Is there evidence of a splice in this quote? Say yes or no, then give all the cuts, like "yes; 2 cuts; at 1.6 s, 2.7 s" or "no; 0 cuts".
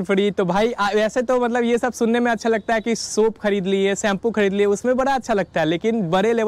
no; 0 cuts